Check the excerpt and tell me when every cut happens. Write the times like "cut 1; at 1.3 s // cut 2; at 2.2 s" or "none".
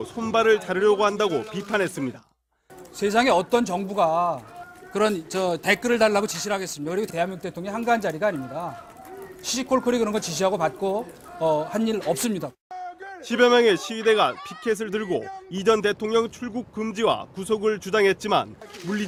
none

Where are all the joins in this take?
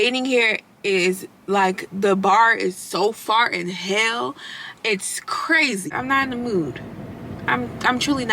cut 1; at 5.9 s

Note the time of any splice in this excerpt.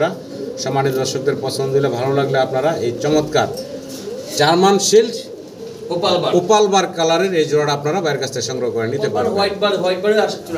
none

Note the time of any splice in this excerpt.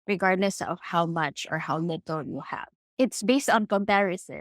cut 1; at 2.9 s

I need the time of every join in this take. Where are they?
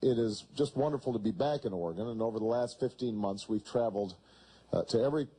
cut 1; at 2.0 s

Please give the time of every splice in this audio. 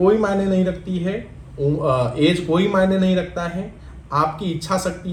none

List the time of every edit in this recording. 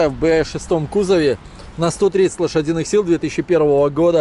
none

